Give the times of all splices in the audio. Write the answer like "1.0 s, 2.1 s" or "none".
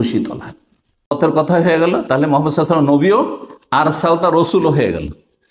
1.2 s